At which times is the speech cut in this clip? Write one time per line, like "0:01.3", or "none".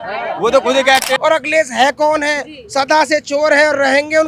0:01.2